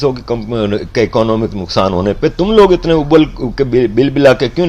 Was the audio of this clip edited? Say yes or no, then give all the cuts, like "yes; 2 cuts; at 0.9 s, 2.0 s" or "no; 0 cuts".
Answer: no; 0 cuts